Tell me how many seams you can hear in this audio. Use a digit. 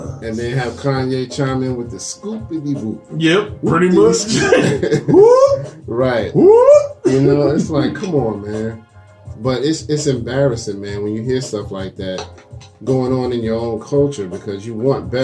0